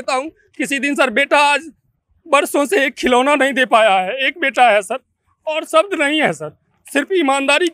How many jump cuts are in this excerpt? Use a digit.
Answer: 0